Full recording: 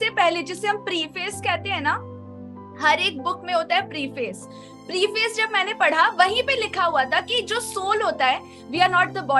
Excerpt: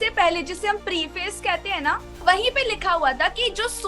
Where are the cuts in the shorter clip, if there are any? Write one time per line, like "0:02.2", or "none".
0:02.2

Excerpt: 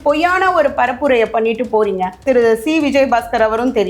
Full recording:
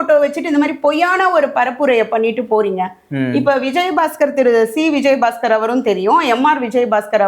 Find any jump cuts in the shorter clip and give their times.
0:02.2

